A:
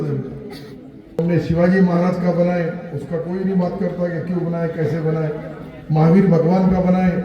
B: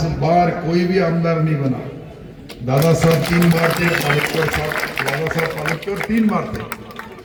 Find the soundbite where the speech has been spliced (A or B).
A